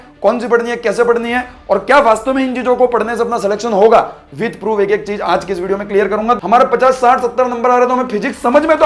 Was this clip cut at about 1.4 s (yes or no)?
no